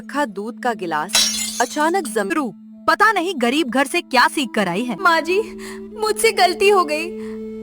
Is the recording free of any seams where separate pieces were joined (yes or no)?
no